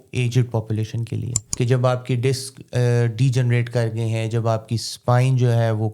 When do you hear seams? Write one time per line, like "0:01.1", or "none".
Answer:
0:01.4